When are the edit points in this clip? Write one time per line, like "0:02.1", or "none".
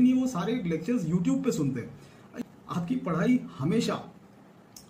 0:02.4